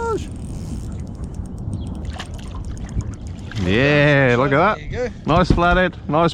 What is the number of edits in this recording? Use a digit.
1